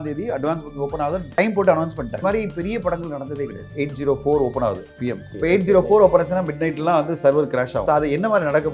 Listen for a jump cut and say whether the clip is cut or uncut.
cut